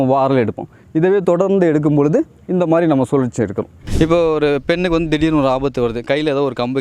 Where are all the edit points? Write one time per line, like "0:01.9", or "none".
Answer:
0:03.8